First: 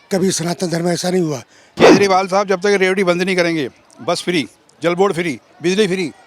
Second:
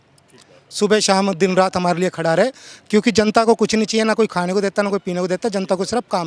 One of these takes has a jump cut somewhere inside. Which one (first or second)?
first